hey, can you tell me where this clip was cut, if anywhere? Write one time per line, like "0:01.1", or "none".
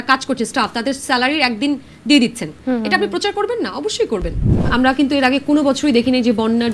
0:04.5